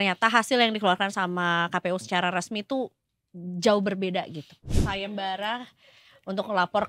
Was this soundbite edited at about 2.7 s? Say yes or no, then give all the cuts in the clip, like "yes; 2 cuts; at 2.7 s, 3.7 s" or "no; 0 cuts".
no; 1 cut; at 4.7 s